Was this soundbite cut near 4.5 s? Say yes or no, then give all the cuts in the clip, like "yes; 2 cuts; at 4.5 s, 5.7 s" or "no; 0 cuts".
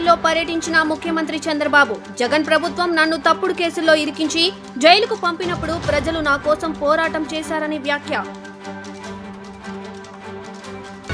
no; 0 cuts